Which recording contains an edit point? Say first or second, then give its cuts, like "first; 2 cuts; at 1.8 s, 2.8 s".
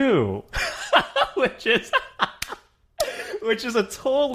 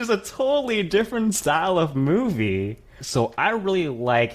second; 1 cut; at 3.0 s